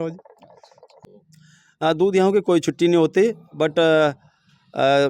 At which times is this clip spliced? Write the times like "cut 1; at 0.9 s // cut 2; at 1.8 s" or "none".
cut 1; at 0.9 s

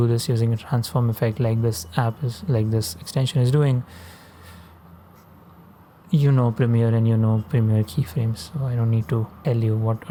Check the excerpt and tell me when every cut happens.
none

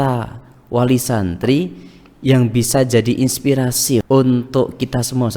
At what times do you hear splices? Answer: cut 1; at 4.0 s

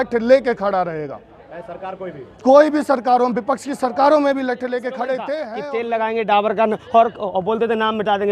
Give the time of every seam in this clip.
cut 1; at 5.5 s

